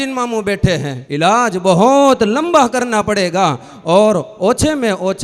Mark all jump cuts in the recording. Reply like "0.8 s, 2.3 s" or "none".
1.0 s